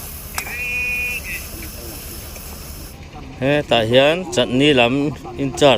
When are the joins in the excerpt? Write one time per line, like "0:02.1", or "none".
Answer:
0:03.0